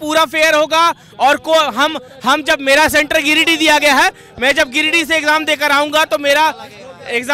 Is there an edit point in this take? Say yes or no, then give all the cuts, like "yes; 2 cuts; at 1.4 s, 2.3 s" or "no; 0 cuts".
no; 0 cuts